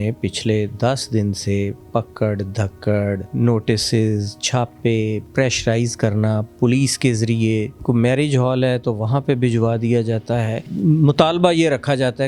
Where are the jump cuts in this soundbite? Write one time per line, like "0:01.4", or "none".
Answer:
0:03.3
0:05.2
0:06.5
0:07.8
0:10.7